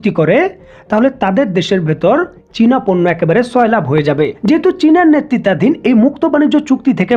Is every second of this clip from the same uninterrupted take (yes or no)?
no